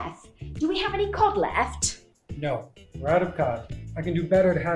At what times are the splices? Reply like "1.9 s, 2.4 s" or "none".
none